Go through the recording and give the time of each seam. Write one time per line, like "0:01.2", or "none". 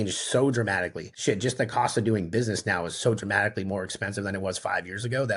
0:01.0